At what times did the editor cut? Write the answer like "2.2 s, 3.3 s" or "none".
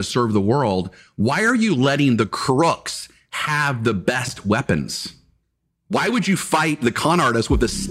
none